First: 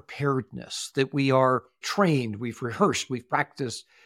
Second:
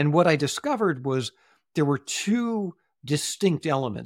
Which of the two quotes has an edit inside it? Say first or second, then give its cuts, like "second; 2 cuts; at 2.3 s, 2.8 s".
first; 1 cut; at 1.8 s